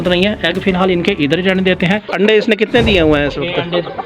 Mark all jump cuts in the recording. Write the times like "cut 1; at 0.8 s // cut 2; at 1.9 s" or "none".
cut 1; at 2.1 s

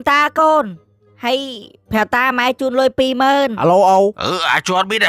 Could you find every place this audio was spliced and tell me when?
cut 1; at 3.5 s

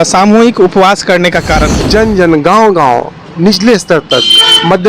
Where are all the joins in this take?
cut 1; at 1.7 s

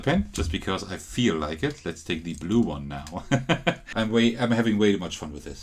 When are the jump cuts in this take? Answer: cut 1; at 3.8 s

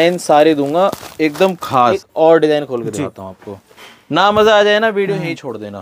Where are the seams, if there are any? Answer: cut 1; at 2.0 s

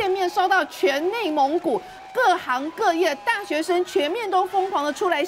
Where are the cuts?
none

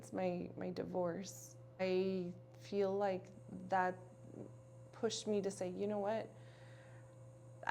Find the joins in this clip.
cut 1; at 1.8 s

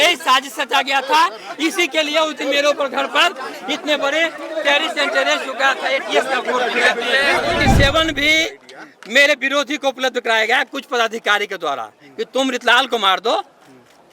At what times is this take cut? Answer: cut 1; at 7.7 s

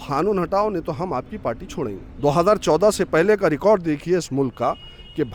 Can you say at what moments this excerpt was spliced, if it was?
cut 1; at 2.1 s

